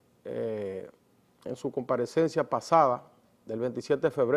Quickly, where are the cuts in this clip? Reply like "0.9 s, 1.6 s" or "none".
none